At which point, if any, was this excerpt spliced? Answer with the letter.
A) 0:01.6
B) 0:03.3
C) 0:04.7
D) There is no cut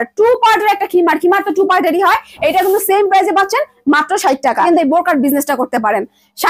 C